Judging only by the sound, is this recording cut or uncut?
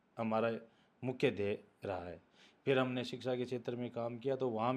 uncut